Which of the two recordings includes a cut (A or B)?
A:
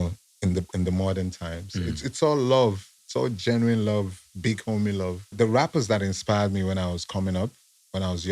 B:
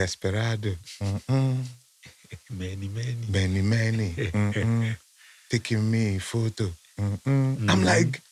A